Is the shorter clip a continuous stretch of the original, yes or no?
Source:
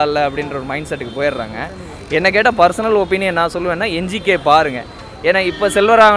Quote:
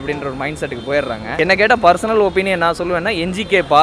no